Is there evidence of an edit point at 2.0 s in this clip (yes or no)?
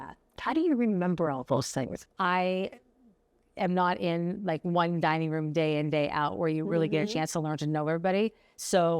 yes